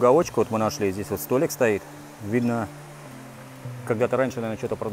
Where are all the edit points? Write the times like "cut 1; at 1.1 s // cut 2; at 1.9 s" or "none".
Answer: none